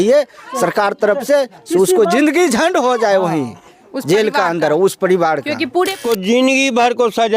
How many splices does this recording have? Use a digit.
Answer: 1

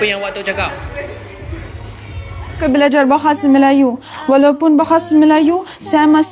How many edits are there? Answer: 1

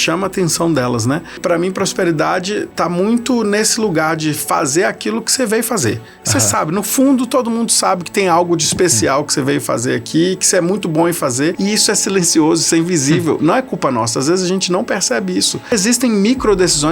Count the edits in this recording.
3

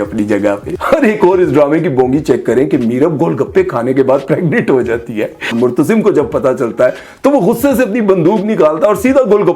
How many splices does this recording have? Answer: 1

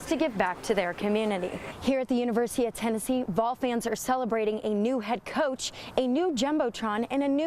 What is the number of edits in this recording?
1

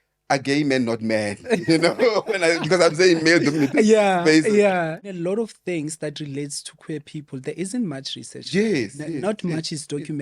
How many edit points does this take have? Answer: 1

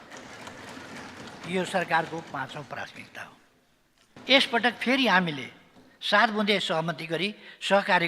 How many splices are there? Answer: 1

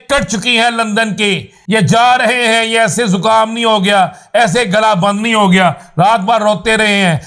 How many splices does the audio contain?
1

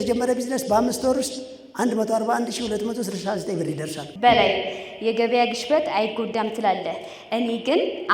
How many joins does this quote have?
1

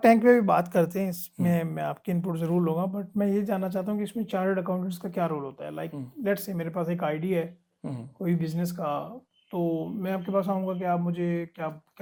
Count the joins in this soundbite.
0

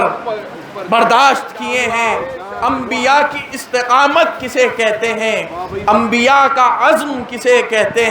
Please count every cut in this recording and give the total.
1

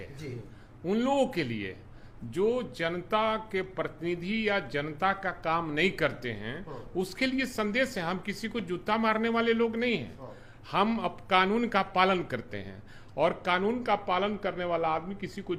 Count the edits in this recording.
0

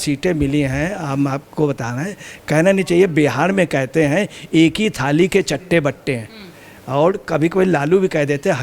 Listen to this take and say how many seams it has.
0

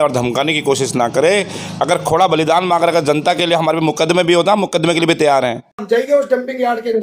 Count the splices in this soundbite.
1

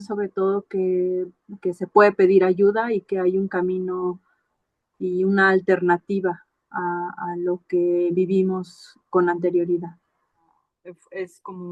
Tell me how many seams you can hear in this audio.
1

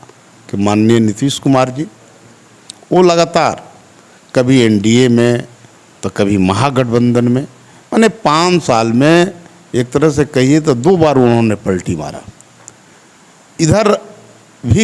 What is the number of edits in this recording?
0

